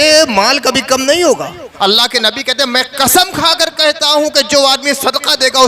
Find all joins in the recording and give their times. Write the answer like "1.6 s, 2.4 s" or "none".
1.6 s